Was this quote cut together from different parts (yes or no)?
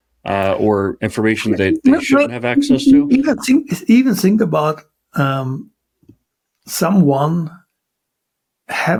no